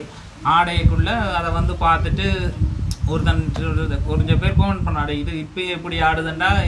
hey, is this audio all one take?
yes; 0 cuts

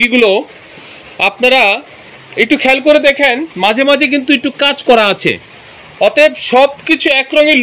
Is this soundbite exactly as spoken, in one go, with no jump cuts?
yes; 0 cuts

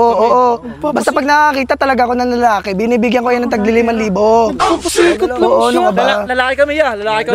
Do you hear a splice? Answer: no; 0 cuts

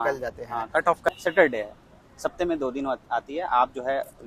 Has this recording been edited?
yes; 1 cut; at 1.1 s

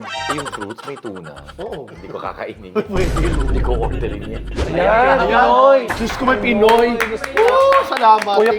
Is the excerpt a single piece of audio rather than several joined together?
no; 2 cuts; at 2.0 s, 4.5 s

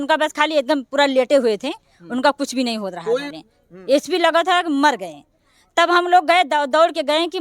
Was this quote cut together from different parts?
yes; 1 cut; at 3.3 s

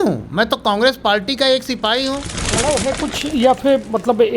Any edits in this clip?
yes; 1 cut; at 2.5 s

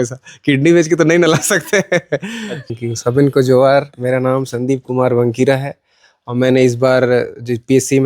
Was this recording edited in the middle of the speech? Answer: yes; 1 cut; at 2.7 s

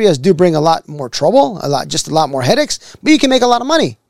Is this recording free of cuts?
yes; 0 cuts

